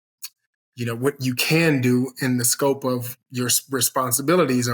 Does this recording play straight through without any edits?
no; 1 cut; at 3.2 s

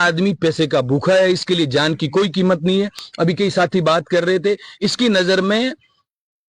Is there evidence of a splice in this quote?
no; 0 cuts

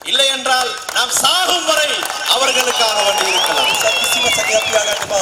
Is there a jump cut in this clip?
no; 0 cuts

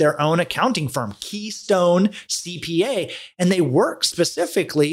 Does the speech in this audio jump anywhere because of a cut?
no; 0 cuts

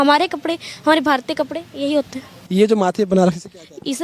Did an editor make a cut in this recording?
yes; 1 cut; at 2.4 s

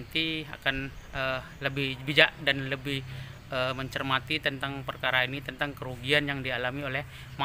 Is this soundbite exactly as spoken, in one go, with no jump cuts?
yes; 0 cuts

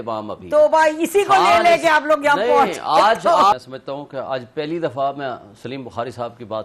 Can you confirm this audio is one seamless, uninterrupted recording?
no; 1 cut; at 3.5 s

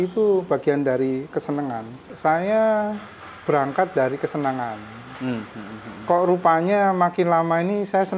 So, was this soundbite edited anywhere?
yes; 1 cut; at 2.0 s

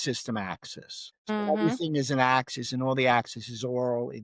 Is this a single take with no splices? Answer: no; 1 cut; at 1.5 s

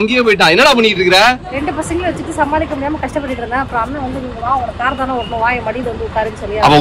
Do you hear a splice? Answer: yes; 1 cut; at 1.6 s

